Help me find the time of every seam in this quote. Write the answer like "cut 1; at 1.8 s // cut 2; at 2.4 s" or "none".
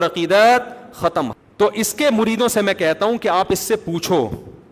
cut 1; at 1.3 s